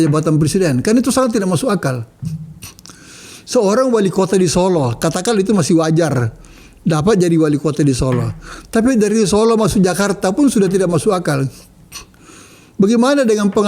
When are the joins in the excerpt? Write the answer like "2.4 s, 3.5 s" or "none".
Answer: none